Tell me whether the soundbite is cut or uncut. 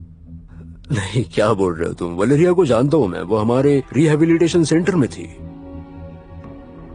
uncut